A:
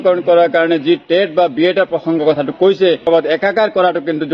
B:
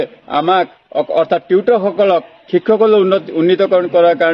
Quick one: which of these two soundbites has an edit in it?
A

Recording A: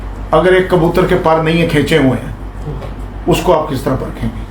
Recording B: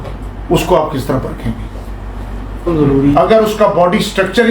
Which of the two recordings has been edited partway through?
B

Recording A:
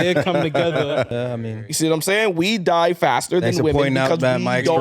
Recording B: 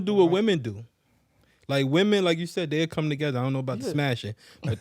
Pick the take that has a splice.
A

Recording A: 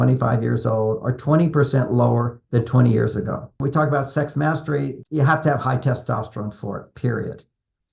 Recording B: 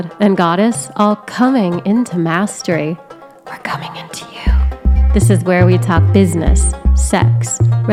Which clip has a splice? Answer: A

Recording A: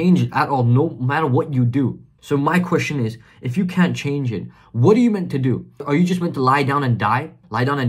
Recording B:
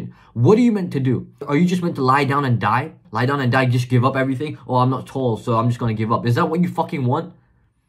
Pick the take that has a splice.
A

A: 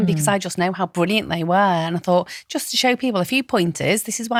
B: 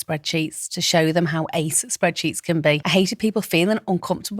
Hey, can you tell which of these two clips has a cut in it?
B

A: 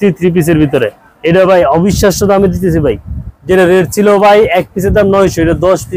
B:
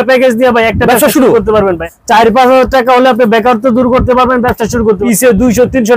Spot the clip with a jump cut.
B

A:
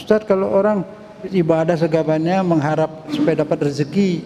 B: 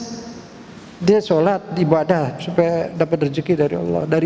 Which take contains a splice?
A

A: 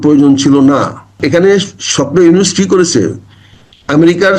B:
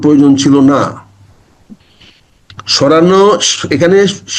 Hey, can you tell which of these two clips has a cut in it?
A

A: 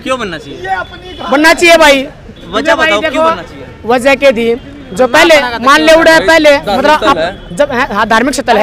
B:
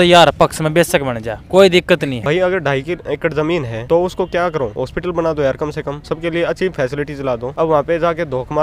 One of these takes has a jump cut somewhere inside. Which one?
B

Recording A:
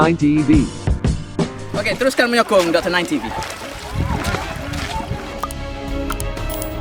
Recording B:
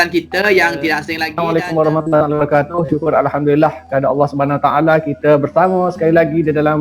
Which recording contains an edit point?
B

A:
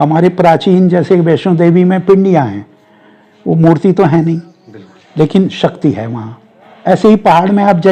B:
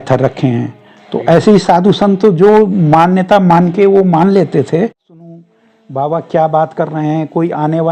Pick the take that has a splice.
B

